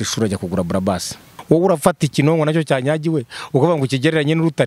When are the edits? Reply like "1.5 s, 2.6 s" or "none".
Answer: 1.3 s